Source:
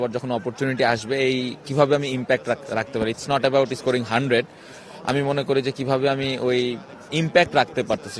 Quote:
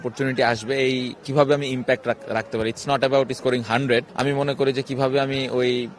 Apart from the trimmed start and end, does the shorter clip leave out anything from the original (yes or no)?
yes